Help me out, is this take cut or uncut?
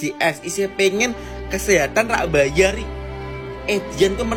uncut